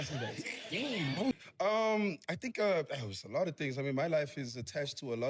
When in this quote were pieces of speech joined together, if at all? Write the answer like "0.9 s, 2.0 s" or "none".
1.4 s